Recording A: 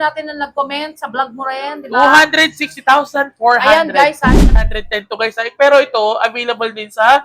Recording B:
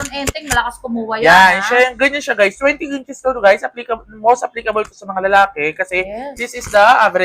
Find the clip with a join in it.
A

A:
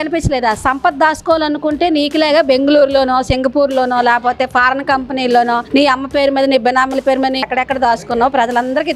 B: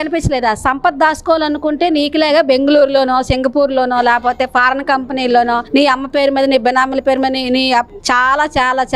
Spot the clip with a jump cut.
A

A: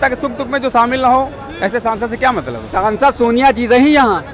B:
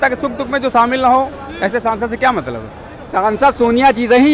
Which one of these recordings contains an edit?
A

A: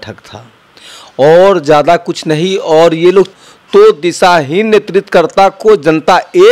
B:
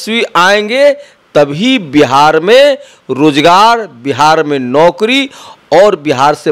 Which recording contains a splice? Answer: A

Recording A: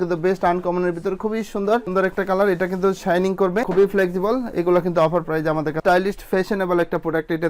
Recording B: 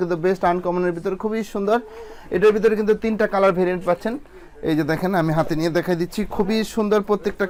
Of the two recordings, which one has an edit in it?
A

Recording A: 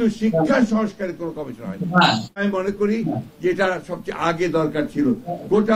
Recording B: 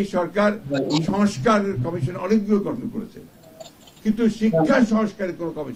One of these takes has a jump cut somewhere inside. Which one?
A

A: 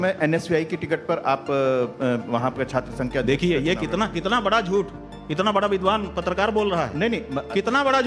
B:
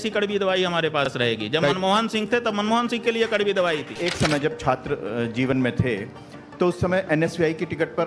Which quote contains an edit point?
B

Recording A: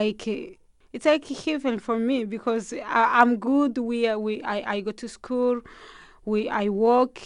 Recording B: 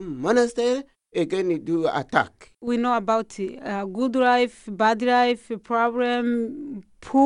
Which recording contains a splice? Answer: B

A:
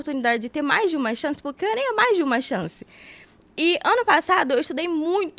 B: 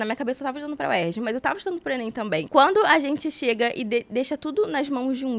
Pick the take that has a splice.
B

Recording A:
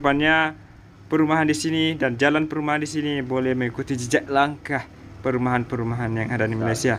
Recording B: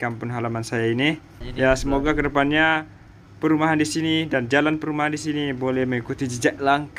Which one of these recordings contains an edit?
B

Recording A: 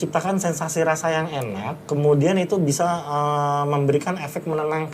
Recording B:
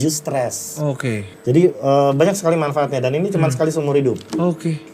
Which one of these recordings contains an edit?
B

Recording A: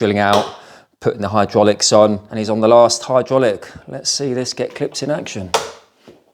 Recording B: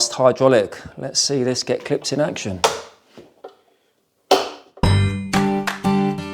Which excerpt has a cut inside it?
B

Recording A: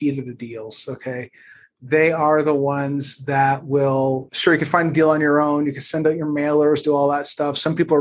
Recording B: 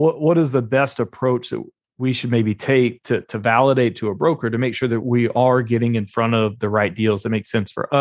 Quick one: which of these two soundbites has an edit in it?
A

